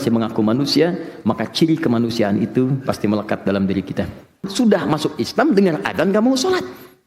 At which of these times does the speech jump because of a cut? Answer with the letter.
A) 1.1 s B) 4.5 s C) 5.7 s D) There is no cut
B